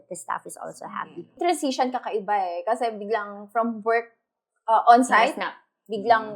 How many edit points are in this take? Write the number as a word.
one